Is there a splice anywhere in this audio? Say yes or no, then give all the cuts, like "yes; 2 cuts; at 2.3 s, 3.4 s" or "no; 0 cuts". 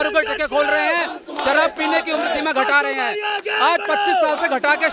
no; 0 cuts